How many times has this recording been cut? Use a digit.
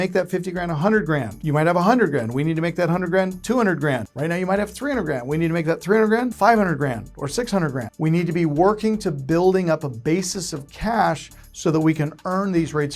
4